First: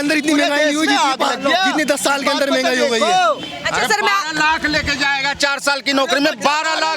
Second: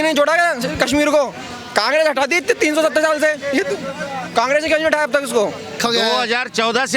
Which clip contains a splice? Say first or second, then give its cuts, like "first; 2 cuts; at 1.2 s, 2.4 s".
second; 1 cut; at 5.8 s